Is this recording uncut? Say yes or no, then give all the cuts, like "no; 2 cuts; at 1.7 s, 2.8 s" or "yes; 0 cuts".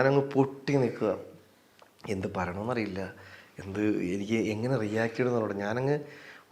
yes; 0 cuts